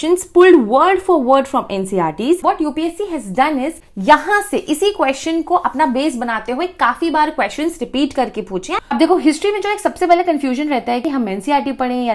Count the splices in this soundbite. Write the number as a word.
three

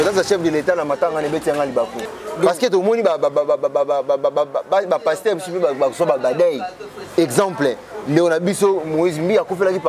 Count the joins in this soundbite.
one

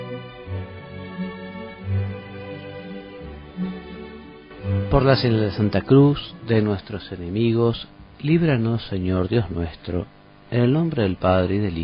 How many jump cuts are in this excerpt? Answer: one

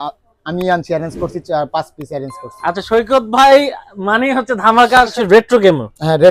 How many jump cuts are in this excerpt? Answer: one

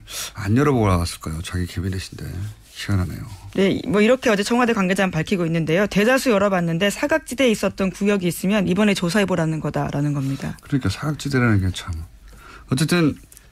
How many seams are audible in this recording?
one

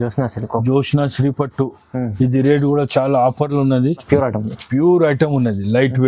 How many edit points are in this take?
one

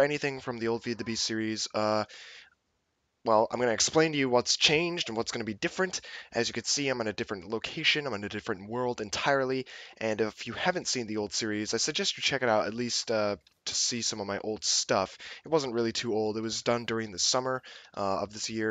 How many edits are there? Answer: one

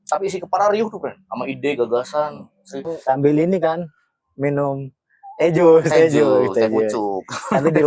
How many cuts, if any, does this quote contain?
one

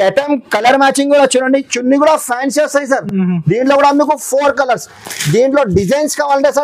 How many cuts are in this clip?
zero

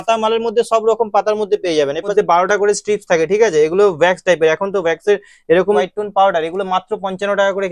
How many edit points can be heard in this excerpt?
two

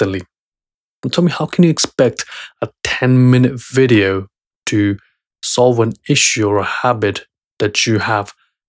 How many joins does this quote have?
zero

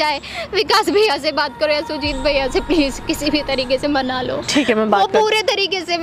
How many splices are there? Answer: zero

